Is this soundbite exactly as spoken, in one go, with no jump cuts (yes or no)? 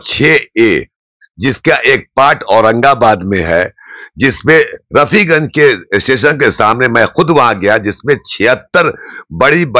yes